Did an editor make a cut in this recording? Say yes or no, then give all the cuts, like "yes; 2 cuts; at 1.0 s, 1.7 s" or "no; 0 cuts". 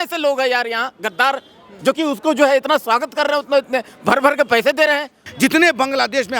yes; 1 cut; at 5.2 s